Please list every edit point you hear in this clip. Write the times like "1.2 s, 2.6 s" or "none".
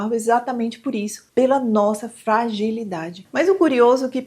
3.2 s